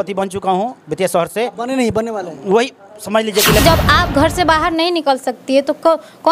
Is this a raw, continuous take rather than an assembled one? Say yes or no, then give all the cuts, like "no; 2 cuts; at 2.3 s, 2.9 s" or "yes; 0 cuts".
no; 1 cut; at 3.6 s